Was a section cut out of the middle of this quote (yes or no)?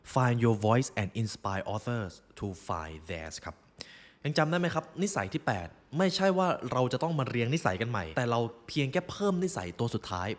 yes